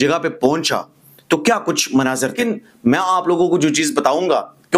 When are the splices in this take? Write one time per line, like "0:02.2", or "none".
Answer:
0:02.4

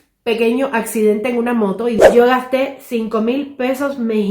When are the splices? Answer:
0:02.0

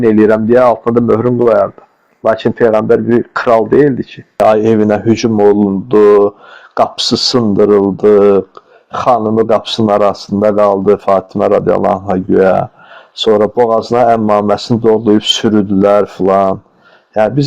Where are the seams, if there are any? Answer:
0:04.4

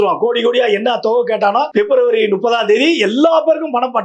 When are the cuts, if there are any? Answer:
0:01.7

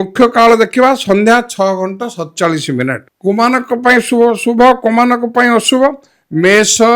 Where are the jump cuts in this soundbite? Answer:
0:03.1

